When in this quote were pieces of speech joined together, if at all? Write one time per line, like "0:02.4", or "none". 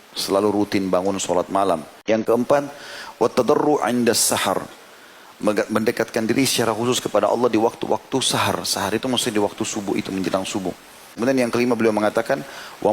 0:01.9
0:11.2